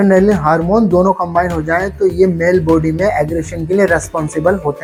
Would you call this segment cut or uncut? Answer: uncut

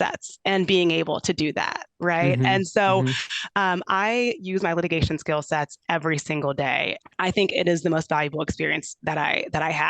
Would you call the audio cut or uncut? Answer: cut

